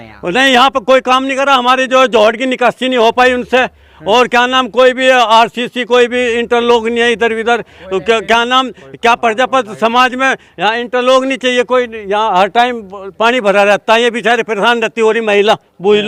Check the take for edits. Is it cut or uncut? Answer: uncut